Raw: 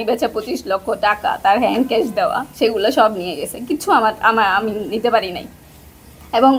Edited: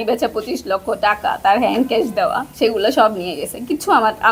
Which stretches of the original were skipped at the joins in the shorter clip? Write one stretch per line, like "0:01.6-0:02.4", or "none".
none